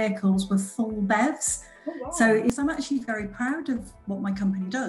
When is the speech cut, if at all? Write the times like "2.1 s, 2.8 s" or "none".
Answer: 2.5 s